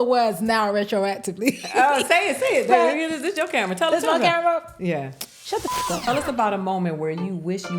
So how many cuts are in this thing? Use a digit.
1